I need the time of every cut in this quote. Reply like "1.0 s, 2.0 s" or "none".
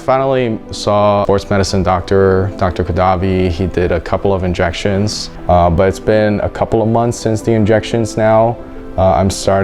1.2 s, 5.2 s